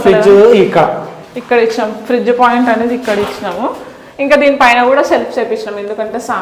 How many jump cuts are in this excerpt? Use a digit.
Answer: 0